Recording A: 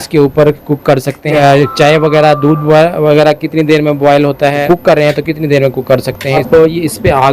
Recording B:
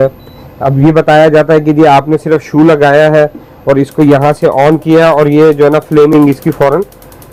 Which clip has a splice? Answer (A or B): A